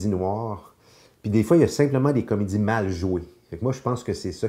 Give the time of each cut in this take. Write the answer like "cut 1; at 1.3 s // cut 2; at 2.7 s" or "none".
none